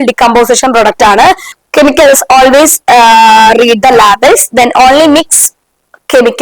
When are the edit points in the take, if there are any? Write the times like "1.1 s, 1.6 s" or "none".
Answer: 1.5 s